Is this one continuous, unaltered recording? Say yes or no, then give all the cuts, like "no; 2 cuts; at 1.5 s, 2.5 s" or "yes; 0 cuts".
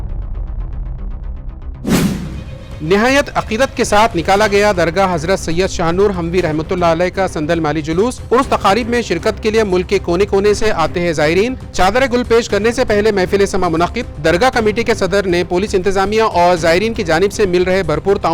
yes; 0 cuts